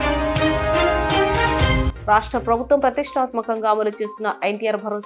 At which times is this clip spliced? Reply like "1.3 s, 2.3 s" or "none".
1.9 s